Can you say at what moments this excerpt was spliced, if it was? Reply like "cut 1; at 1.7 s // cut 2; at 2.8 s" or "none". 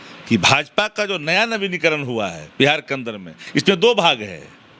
none